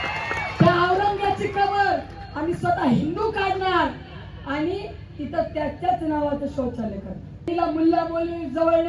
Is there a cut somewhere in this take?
yes; 1 cut; at 7.5 s

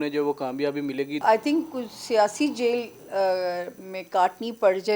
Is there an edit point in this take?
yes; 1 cut; at 1.2 s

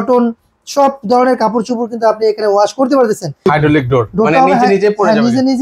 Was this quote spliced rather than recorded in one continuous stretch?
yes; 1 cut; at 3.5 s

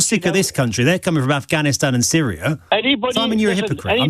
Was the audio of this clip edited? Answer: yes; 1 cut; at 2.6 s

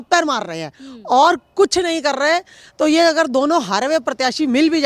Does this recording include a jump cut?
no; 0 cuts

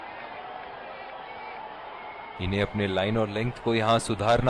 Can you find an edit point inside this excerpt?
yes; 1 cut; at 2.4 s

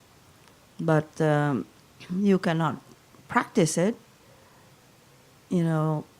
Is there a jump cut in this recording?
yes; 1 cut; at 1.6 s

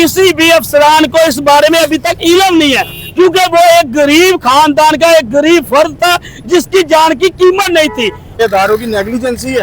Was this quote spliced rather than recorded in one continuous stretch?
yes; 1 cut; at 8.4 s

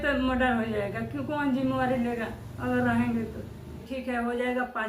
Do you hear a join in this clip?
yes; 1 cut; at 3.8 s

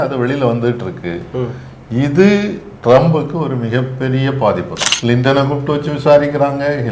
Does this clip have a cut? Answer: yes; 1 cut; at 4.8 s

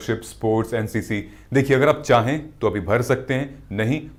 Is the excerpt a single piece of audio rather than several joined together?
yes; 0 cuts

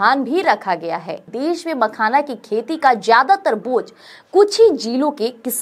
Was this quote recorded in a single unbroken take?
no; 1 cut; at 1.2 s

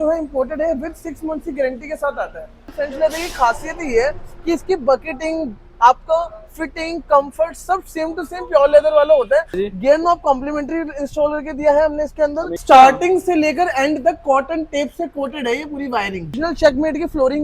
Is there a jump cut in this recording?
yes; 4 cuts; at 2.7 s, 9.6 s, 12.5 s, 16.3 s

